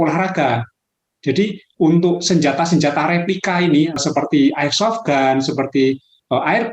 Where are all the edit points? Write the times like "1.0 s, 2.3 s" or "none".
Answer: 4.0 s